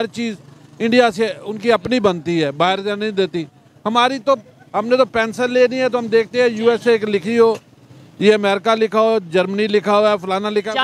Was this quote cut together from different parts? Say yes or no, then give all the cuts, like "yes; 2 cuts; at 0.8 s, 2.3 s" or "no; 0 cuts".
no; 0 cuts